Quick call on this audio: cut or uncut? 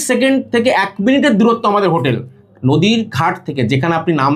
uncut